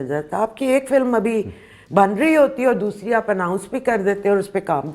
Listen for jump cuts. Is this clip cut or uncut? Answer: uncut